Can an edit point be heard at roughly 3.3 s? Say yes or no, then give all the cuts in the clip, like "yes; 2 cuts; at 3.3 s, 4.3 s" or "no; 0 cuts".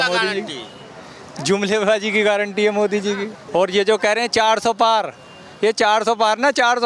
yes; 1 cut; at 3.3 s